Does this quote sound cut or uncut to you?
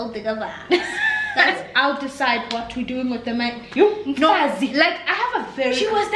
cut